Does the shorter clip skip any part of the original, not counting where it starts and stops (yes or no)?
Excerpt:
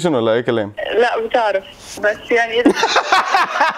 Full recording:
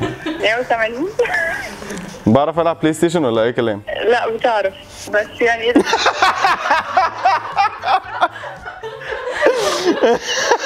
no